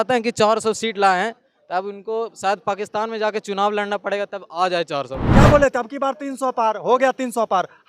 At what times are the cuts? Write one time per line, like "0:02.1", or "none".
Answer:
0:05.2